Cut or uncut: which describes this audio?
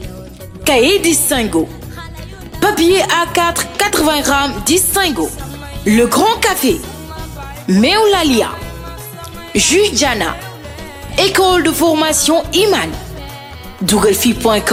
uncut